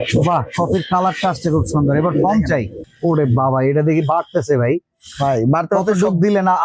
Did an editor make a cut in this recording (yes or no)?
yes